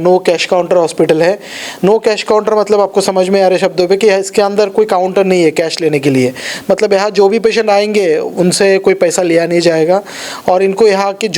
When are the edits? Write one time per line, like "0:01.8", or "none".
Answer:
none